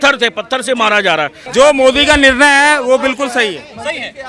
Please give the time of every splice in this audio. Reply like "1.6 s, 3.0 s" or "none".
1.4 s